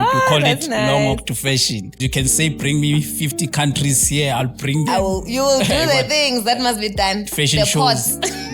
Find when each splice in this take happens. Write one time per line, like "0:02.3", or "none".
0:02.0

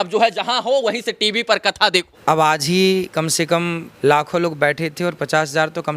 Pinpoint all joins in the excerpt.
0:02.1
0:03.8

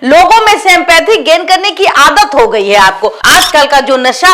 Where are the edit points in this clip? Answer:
0:03.1

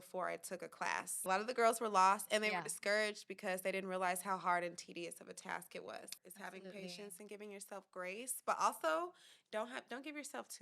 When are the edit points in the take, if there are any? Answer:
0:01.3
0:06.2

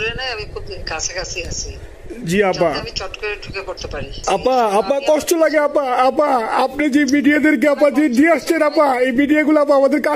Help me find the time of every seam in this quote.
0:04.1

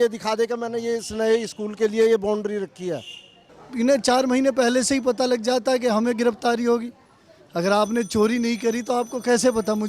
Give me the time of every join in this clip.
0:03.6

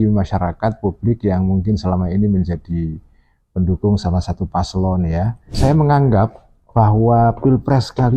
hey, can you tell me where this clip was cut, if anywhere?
0:05.6

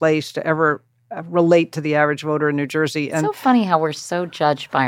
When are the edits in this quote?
0:03.3

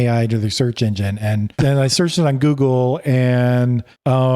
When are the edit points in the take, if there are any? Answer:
0:01.5

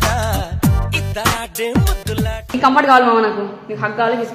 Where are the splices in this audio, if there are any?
0:02.5

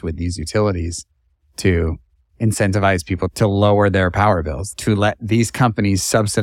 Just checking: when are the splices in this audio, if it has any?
0:03.3
0:04.6

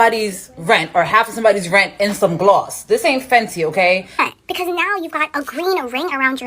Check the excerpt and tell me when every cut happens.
0:04.2

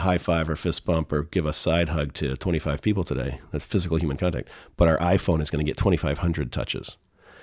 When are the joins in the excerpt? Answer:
none

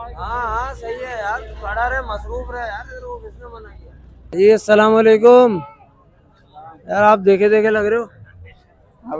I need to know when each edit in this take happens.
0:04.3

